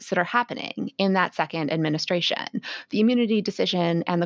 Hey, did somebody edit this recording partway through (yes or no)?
no